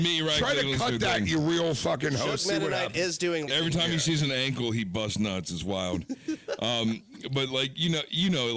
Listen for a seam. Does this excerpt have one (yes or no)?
no